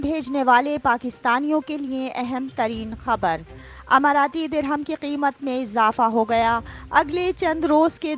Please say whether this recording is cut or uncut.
uncut